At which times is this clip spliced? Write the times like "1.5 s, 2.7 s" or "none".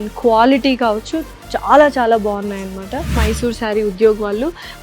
3.2 s